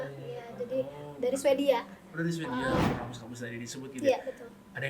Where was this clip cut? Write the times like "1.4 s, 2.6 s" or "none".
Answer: 2.9 s